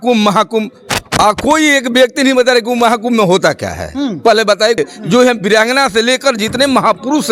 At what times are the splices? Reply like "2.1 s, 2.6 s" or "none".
4.8 s